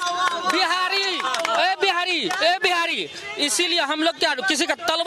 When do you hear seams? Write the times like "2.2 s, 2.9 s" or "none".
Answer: none